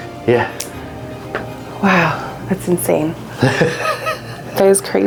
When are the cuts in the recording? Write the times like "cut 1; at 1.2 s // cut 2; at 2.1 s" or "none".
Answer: none